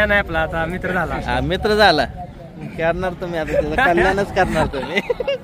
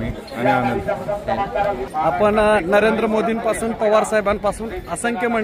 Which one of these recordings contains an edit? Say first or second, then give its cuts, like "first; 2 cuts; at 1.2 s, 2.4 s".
second; 1 cut; at 1.8 s